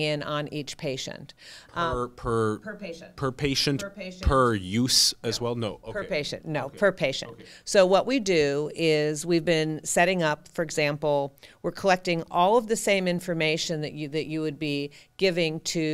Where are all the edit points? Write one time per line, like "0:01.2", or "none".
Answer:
none